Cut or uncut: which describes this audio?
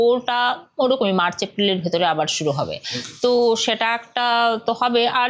uncut